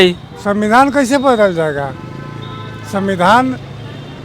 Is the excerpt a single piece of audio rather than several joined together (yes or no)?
yes